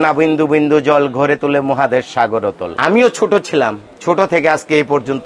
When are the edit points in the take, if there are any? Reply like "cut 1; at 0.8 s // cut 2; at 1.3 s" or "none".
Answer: none